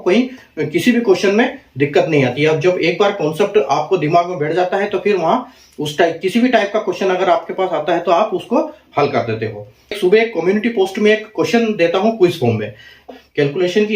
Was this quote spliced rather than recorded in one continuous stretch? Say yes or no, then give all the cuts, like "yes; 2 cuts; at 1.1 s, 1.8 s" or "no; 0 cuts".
yes; 2 cuts; at 10.0 s, 13.1 s